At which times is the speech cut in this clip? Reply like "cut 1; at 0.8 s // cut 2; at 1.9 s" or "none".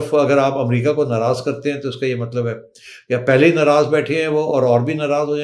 none

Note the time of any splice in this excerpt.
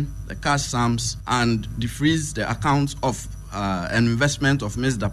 cut 1; at 1.1 s

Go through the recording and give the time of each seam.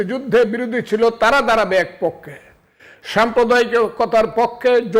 none

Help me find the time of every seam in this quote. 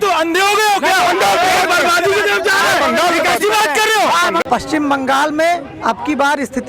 cut 1; at 4.4 s

